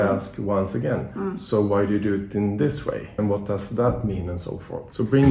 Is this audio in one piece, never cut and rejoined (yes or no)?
no